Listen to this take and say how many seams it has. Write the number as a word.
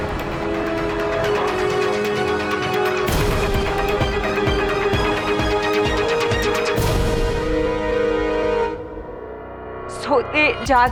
zero